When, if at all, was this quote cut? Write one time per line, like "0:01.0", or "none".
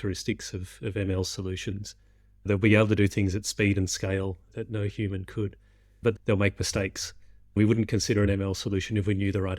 0:02.5
0:06.1
0:07.6